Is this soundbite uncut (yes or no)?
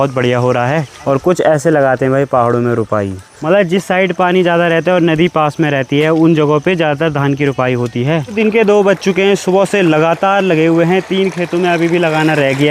no